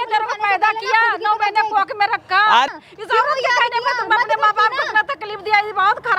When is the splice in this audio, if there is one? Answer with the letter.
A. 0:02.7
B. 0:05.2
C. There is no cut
A